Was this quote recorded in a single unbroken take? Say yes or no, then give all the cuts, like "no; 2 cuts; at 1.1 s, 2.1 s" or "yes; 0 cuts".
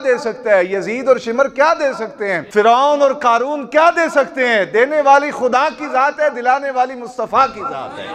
no; 1 cut; at 2.4 s